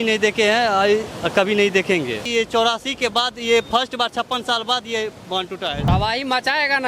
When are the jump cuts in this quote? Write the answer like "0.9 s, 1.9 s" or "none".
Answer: 2.2 s, 5.9 s